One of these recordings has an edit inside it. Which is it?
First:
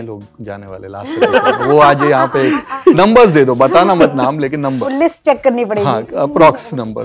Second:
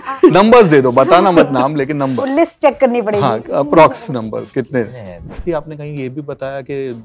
second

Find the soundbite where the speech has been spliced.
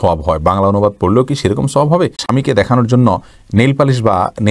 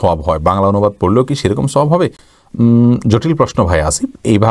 first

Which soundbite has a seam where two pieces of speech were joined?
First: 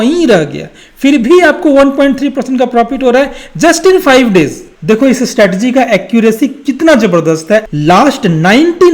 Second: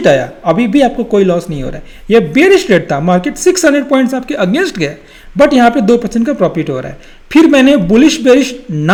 first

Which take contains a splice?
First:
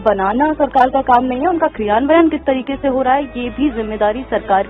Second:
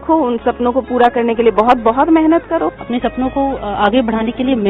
second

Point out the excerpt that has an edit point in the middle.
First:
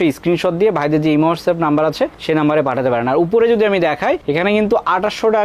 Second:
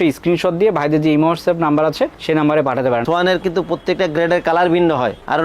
second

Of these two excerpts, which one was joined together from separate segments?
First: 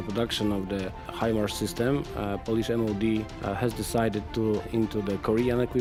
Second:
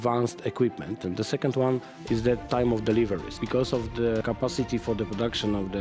second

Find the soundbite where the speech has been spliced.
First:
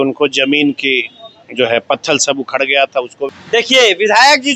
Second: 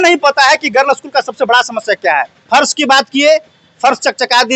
first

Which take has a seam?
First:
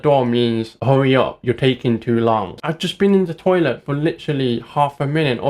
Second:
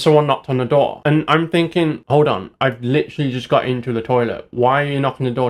first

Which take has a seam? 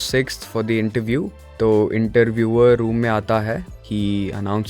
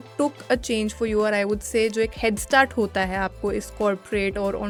first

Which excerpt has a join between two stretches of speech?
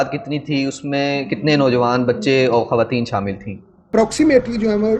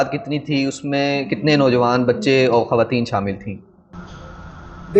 first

